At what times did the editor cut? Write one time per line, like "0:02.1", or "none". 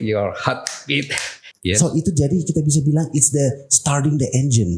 0:01.4